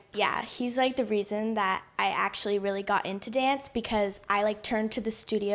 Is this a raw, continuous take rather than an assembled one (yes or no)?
yes